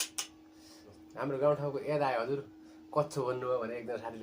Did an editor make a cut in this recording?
yes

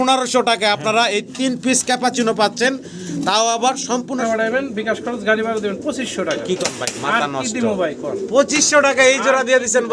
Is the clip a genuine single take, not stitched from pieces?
no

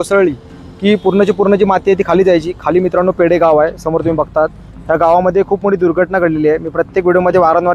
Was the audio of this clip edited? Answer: no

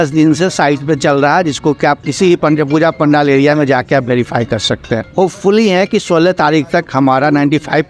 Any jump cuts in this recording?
yes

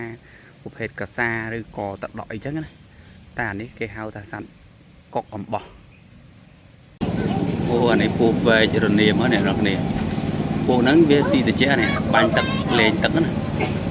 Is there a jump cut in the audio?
yes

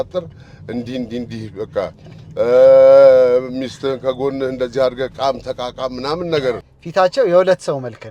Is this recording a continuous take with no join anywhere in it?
no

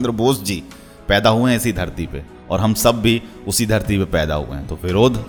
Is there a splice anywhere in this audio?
no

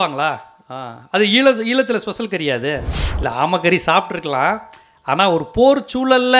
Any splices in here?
yes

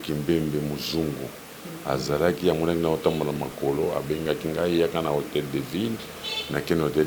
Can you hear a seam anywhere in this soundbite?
no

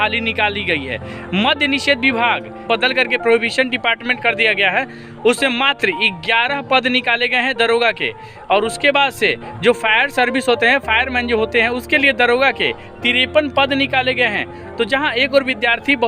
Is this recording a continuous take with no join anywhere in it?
no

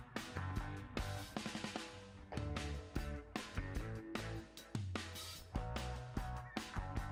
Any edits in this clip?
no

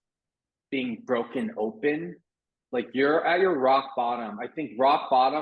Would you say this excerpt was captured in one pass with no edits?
yes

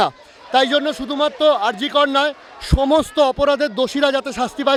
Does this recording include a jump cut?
no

